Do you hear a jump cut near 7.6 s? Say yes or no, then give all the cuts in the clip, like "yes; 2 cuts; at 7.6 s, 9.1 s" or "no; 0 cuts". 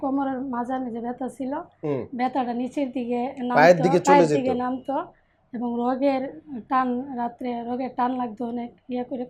no; 0 cuts